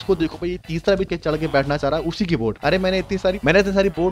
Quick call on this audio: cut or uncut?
uncut